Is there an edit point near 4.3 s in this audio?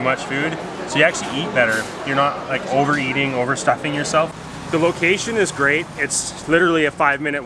yes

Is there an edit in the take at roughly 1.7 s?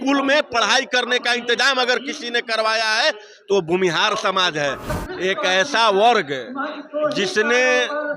no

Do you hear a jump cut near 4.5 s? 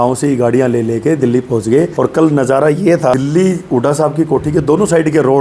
no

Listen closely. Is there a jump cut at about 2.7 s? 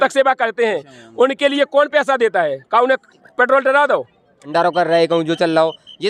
no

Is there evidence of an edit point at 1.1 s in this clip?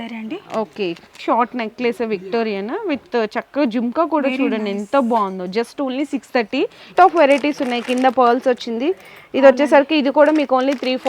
yes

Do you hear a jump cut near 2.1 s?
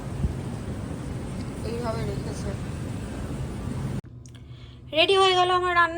no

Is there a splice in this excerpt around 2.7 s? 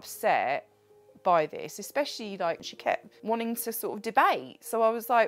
yes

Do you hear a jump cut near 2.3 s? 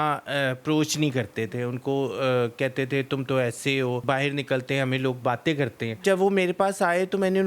no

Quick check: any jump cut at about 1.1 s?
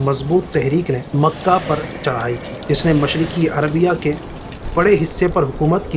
yes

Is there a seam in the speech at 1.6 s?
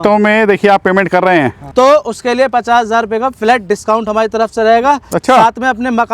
yes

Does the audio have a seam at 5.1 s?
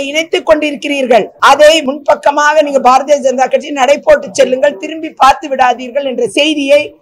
no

